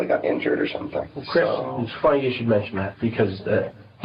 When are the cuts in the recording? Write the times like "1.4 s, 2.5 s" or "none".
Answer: 1.0 s